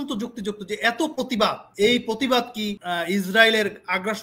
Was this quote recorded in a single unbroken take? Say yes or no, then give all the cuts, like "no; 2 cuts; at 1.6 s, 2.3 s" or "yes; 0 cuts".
no; 2 cuts; at 1.6 s, 2.8 s